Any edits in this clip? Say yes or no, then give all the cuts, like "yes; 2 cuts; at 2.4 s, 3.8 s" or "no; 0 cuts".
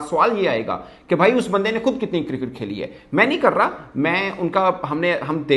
no; 0 cuts